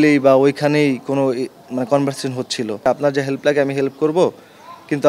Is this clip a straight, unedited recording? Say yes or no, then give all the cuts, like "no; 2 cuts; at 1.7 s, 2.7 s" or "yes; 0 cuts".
no; 1 cut; at 2.9 s